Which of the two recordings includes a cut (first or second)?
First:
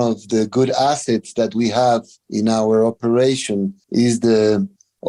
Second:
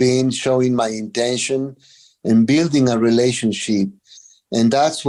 first